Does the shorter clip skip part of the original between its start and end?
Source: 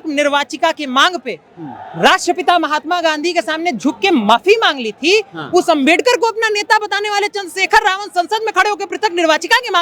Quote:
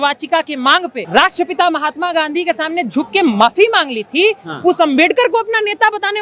yes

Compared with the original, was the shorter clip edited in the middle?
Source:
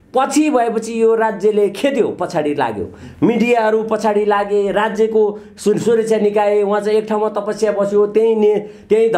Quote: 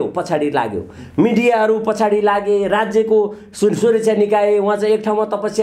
no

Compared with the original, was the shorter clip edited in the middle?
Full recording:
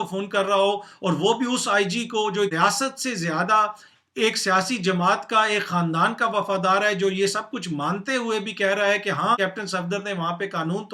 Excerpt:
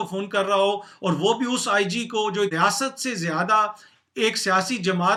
no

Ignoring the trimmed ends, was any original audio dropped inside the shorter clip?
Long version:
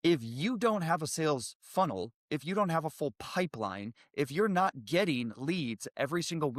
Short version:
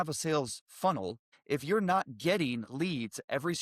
yes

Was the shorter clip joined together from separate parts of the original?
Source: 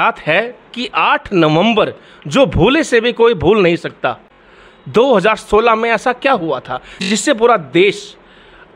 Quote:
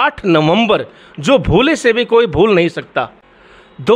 no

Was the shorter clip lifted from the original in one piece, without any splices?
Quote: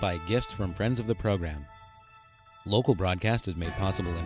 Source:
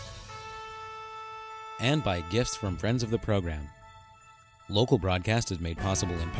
yes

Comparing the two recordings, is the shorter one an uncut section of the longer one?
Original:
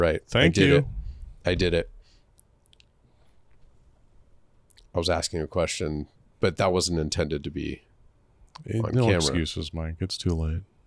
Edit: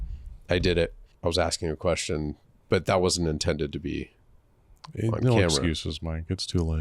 no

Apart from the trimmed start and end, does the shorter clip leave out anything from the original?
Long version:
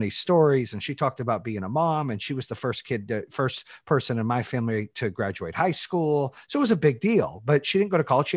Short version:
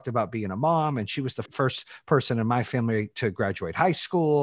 yes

